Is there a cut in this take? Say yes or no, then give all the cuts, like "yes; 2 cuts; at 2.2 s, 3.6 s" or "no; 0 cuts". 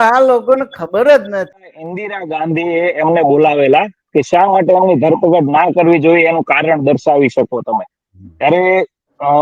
yes; 1 cut; at 1.6 s